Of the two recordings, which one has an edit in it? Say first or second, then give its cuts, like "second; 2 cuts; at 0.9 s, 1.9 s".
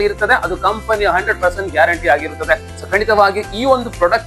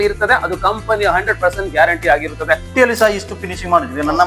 second; 1 cut; at 2.7 s